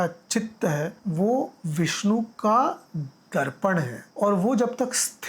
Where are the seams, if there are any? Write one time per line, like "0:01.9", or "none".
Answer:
0:01.0
0:02.0
0:04.0